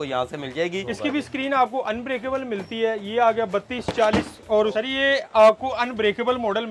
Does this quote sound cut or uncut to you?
cut